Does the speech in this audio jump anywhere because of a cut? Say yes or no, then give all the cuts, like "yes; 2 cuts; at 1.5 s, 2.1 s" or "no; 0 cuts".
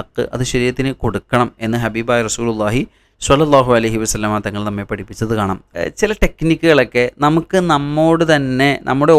yes; 1 cut; at 5.6 s